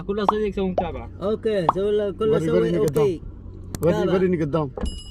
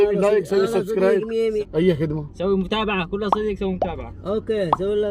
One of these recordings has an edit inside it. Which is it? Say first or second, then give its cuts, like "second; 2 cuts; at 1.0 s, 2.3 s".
second; 1 cut; at 1.7 s